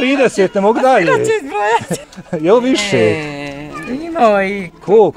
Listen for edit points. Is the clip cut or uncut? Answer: cut